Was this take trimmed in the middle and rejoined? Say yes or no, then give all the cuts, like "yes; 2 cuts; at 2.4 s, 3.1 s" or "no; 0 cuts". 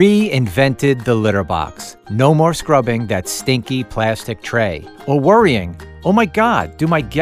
no; 0 cuts